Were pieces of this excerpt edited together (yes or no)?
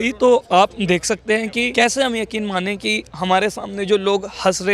yes